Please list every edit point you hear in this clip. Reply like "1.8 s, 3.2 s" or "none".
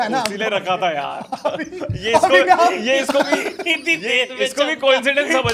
none